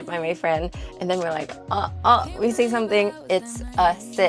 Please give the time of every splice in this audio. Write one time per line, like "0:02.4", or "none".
0:03.2